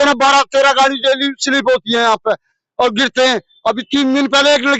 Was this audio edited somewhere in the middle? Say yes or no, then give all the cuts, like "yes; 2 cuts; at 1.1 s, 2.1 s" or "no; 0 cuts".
no; 0 cuts